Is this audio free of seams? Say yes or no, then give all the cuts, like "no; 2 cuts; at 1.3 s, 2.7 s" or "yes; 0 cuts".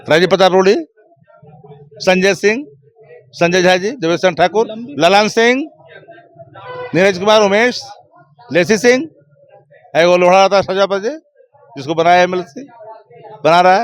yes; 0 cuts